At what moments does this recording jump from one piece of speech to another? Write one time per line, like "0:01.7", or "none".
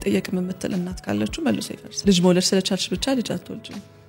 0:02.0